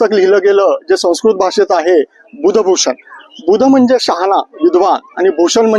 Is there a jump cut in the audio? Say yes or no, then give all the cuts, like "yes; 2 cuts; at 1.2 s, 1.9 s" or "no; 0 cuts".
no; 0 cuts